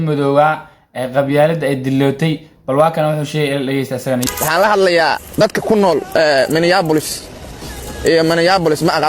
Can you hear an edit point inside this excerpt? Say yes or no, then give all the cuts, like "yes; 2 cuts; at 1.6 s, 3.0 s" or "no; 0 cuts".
yes; 1 cut; at 4.2 s